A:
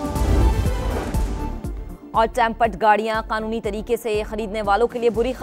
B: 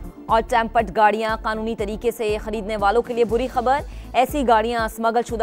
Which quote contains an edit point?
A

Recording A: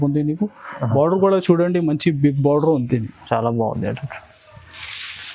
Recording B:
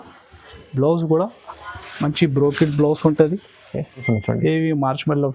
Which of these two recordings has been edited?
B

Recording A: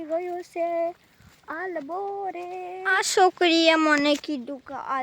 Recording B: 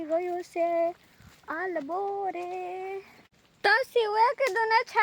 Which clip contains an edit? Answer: A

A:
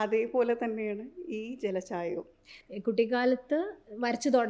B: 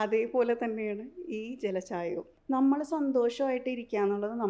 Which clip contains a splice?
B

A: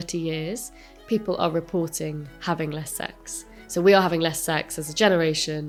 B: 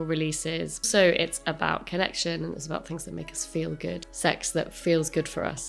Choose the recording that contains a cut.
B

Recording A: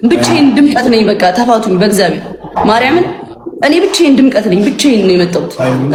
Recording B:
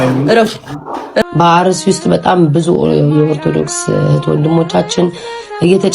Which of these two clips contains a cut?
B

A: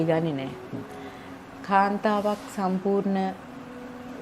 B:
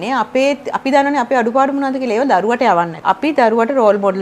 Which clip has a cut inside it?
B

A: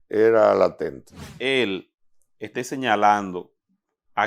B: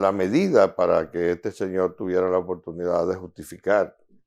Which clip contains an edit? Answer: A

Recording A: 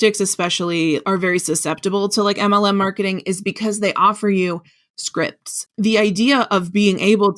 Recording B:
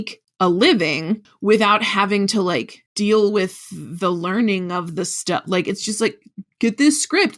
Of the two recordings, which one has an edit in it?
A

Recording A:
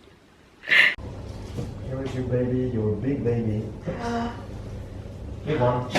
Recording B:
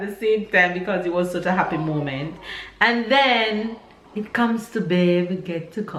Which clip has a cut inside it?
A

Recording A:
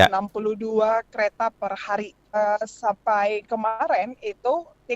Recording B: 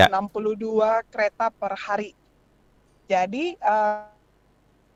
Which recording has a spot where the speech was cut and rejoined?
A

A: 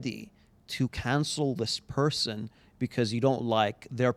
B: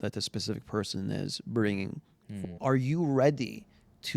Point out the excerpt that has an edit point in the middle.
B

